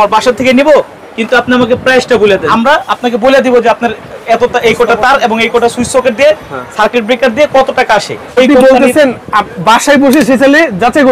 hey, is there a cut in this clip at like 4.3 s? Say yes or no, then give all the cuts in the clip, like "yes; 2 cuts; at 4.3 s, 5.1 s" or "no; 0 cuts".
no; 2 cuts; at 2.5 s, 8.4 s